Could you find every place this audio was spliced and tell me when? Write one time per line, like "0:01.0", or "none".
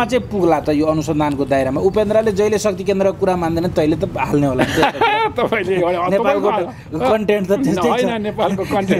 none

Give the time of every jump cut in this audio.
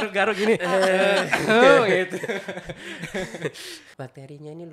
0:03.8

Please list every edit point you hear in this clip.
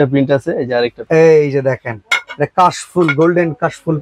0:01.0

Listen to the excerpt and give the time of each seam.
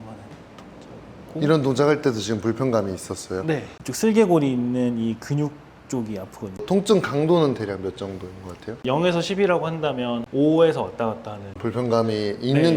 0:03.7
0:06.6
0:11.6

